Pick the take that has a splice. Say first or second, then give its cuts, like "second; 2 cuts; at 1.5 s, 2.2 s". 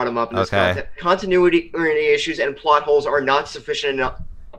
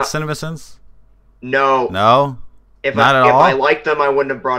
first; 1 cut; at 1.0 s